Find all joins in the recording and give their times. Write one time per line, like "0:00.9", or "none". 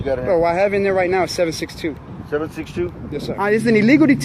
0:03.3